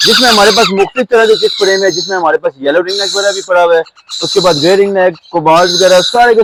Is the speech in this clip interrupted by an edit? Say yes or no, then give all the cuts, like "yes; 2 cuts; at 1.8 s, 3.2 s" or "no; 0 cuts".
no; 0 cuts